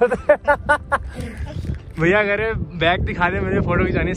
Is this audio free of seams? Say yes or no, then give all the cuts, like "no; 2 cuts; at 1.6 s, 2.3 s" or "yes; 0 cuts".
yes; 0 cuts